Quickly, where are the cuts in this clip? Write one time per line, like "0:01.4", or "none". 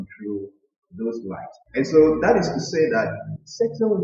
0:01.5